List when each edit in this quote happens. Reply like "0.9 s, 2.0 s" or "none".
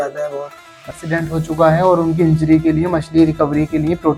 1.0 s